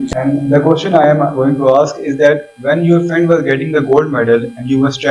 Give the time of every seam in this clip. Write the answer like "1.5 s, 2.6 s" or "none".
none